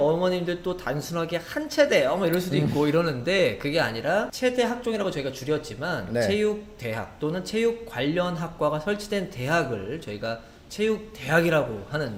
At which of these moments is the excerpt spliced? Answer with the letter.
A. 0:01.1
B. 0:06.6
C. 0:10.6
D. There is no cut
D